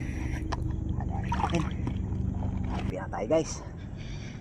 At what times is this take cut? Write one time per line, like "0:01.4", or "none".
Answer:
0:02.9